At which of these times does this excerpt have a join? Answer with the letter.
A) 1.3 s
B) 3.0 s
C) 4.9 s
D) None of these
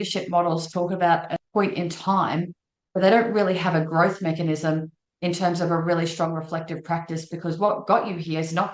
A